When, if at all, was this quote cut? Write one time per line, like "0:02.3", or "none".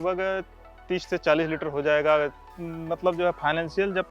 0:02.6